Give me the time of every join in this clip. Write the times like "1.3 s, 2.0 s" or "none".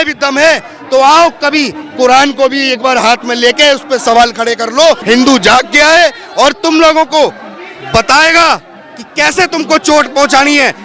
5.0 s